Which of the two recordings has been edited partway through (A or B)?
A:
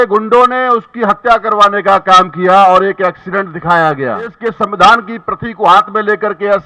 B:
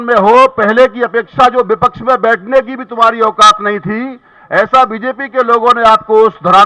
A